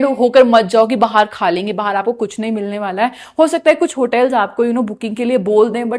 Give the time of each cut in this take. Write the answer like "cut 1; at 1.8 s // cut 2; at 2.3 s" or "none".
none